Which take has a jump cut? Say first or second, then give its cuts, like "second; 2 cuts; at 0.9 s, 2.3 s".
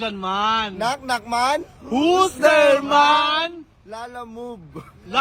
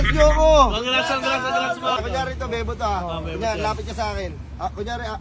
second; 1 cut; at 2.0 s